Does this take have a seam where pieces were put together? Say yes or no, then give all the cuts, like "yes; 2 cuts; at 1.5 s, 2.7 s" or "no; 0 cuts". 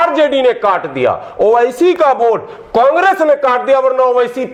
no; 0 cuts